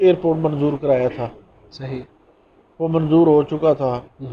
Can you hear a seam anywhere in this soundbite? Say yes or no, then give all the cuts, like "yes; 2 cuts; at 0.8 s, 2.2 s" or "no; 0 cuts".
no; 0 cuts